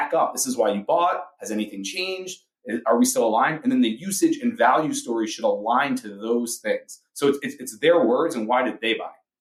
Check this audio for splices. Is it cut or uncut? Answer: uncut